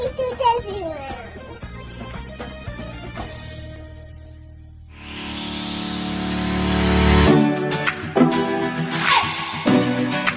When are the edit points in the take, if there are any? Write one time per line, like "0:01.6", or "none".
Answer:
0:03.8